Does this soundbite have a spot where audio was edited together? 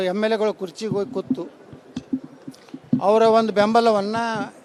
no; 0 cuts

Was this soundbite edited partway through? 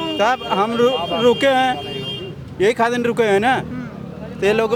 no; 0 cuts

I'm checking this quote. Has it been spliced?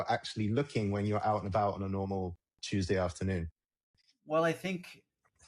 no; 0 cuts

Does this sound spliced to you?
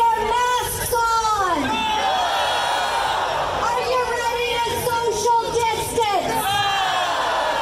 no; 0 cuts

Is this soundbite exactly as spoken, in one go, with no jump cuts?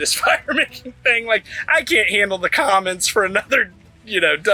yes; 0 cuts

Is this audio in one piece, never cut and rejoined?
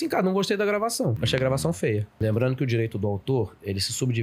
no; 2 cuts; at 1.2 s, 2.1 s

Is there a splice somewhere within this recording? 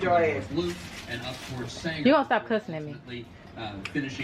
no; 0 cuts

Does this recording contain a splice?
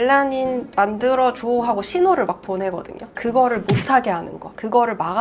no; 0 cuts

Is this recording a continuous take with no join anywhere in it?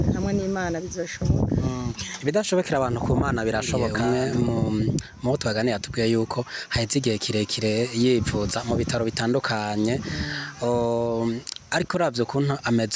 no; 1 cut; at 3.9 s

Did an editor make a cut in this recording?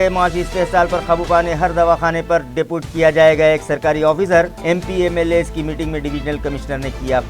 no; 0 cuts

